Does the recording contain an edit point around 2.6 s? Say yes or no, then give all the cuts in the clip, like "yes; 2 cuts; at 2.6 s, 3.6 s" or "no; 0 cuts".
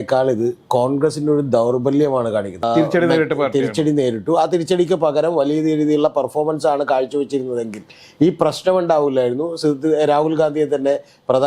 yes; 1 cut; at 2.6 s